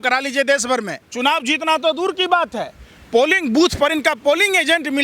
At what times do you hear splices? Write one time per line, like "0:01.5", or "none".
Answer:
0:01.0